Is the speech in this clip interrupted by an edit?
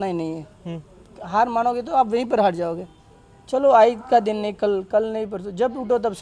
no; 0 cuts

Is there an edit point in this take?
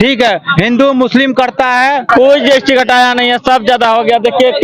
yes; 1 cut; at 2.1 s

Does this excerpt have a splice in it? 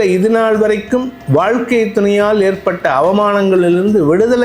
no; 0 cuts

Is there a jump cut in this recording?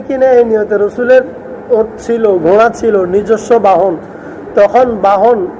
no; 0 cuts

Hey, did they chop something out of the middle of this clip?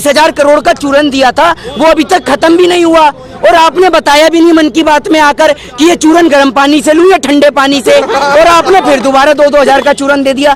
no; 0 cuts

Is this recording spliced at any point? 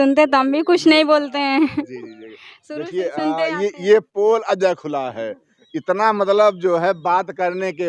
no; 0 cuts

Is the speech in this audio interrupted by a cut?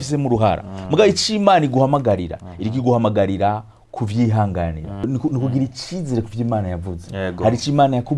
yes; 1 cut; at 5.1 s

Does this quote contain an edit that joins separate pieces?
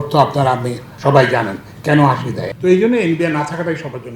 no; 0 cuts

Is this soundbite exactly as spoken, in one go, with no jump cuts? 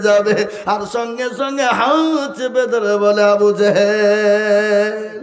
yes; 0 cuts

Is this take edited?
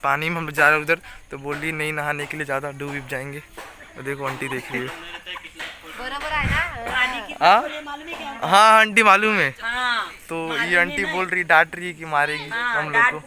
no; 0 cuts

